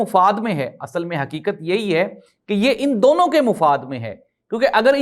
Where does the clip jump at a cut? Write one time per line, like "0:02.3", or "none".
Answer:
none